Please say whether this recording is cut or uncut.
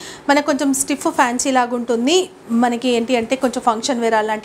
uncut